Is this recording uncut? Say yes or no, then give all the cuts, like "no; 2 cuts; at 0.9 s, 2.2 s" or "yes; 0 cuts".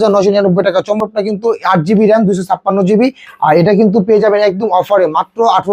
no; 1 cut; at 1.0 s